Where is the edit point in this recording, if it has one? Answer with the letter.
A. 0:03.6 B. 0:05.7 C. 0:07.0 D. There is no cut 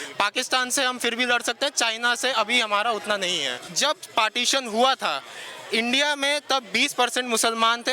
A